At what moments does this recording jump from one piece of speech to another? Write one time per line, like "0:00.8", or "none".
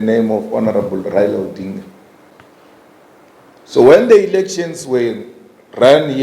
0:02.3